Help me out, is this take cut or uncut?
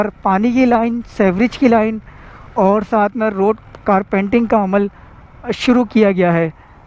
uncut